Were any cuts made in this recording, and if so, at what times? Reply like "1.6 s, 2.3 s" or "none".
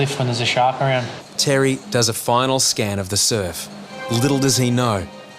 1.2 s, 3.9 s